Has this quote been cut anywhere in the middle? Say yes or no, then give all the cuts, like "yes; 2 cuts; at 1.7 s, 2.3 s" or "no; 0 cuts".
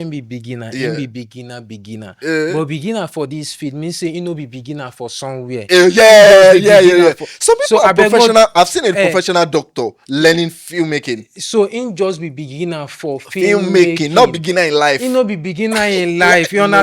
no; 0 cuts